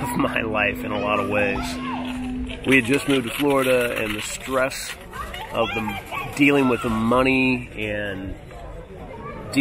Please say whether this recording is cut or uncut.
uncut